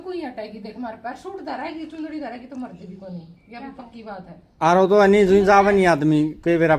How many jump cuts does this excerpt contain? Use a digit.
0